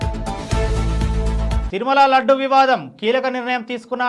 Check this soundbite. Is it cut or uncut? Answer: cut